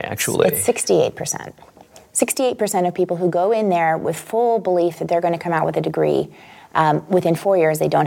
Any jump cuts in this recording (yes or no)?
no